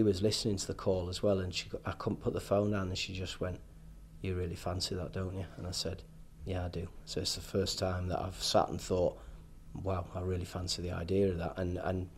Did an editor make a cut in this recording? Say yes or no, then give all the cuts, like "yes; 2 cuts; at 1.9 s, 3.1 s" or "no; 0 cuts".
no; 0 cuts